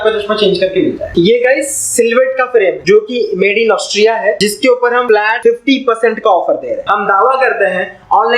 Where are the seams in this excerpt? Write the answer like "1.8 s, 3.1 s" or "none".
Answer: 1.0 s, 2.8 s, 4.9 s, 6.8 s